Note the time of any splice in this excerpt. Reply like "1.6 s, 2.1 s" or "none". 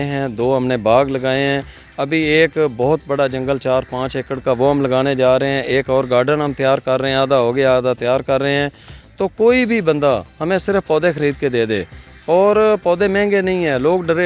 none

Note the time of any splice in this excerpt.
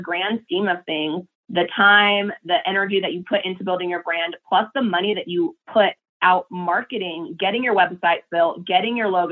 none

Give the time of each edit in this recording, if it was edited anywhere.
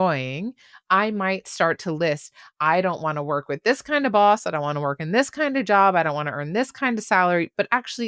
none

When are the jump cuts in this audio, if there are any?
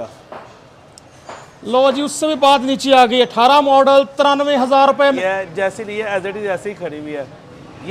5.2 s

